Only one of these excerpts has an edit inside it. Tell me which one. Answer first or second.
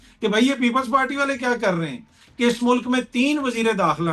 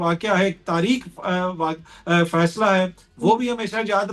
first